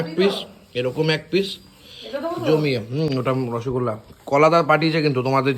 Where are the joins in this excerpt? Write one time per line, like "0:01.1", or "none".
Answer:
none